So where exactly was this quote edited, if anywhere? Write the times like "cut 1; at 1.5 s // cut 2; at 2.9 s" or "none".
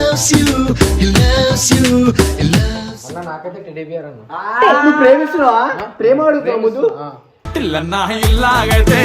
cut 1; at 2.8 s